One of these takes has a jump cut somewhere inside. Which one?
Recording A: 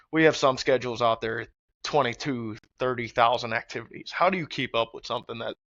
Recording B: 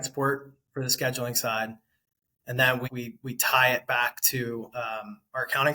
B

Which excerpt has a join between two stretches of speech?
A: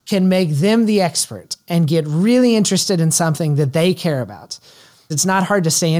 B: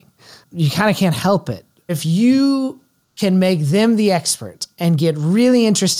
B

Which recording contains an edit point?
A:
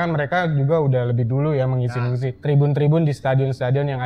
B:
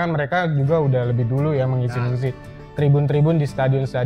A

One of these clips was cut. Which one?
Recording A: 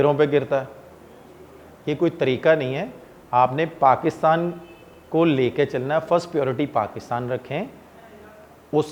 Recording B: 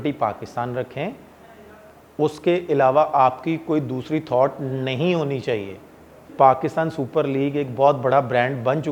B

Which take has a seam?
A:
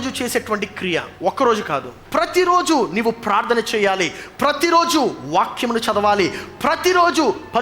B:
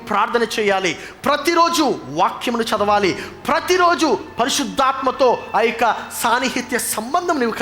A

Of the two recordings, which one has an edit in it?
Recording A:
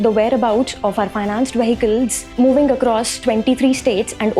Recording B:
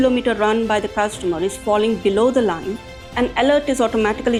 A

